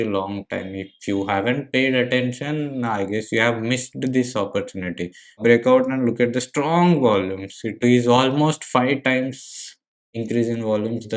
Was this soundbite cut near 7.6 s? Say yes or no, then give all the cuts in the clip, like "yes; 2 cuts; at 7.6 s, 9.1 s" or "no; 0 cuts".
no; 1 cut; at 5.4 s